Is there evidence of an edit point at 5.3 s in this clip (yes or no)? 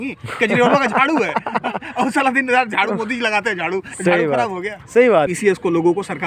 yes